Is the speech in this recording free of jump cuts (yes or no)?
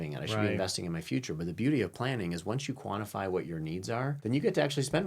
no